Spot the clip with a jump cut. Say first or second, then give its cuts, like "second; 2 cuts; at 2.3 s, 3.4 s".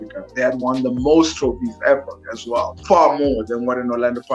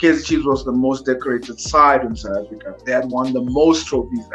first; 1 cut; at 2.8 s